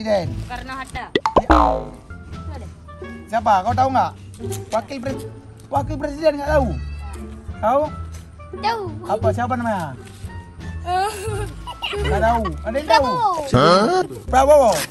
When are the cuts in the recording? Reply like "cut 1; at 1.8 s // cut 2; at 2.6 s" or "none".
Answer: cut 1; at 5.2 s